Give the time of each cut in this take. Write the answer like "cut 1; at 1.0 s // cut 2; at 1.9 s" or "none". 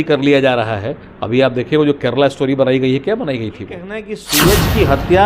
cut 1; at 4.1 s